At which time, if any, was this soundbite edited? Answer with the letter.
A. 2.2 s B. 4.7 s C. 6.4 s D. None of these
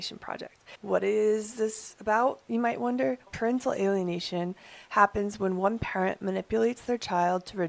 D